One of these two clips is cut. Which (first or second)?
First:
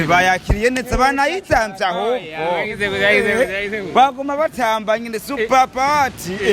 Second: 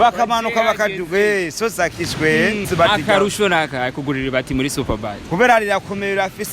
second